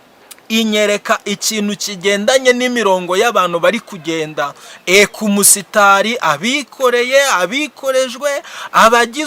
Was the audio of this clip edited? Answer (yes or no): no